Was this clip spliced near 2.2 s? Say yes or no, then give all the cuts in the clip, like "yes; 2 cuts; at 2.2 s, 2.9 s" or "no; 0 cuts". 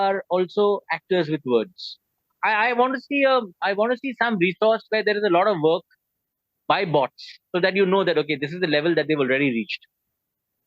yes; 1 cut; at 2.2 s